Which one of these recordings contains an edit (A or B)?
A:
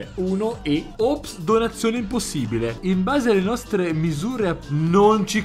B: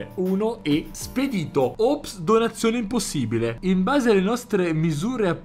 A